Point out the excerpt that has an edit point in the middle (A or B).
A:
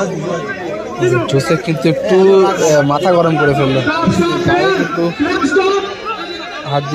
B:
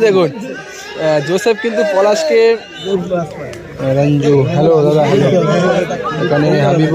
B